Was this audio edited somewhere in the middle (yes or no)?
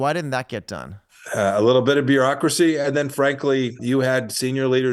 yes